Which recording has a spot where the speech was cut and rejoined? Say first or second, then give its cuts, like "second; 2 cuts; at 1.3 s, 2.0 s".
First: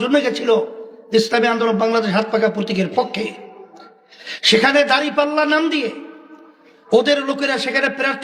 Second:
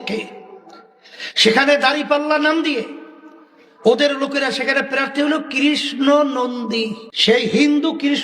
second; 1 cut; at 7.0 s